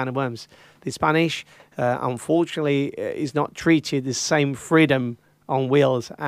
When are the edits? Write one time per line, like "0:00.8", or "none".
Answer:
none